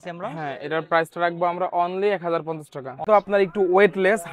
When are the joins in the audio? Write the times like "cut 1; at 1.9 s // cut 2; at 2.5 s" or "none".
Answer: cut 1; at 3.0 s

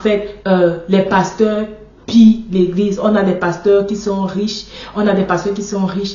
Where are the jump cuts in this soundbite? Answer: none

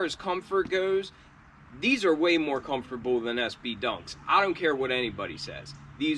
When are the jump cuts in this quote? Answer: none

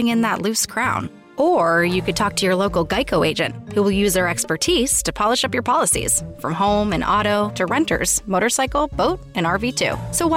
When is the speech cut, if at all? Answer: none

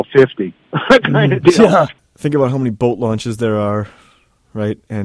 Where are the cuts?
cut 1; at 1.9 s

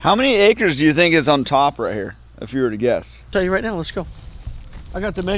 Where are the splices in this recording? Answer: none

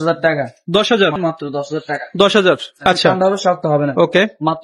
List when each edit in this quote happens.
cut 1; at 1.2 s // cut 2; at 2.8 s

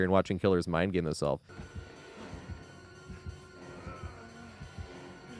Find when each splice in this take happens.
cut 1; at 1.5 s

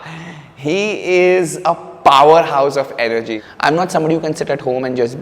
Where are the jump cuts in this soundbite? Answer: cut 1; at 3.4 s

